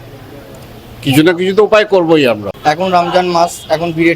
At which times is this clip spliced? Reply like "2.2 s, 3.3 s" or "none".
2.5 s